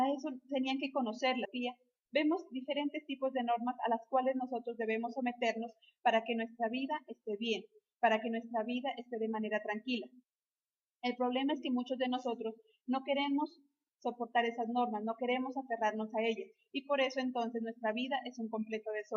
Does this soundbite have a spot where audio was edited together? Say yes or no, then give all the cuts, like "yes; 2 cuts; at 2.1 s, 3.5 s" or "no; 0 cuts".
no; 0 cuts